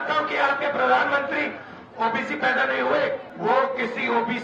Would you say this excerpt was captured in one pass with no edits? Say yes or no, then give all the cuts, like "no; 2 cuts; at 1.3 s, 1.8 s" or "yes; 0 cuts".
no; 1 cut; at 3.3 s